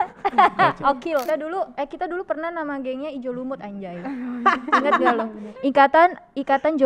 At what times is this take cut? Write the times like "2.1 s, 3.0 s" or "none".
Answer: 1.2 s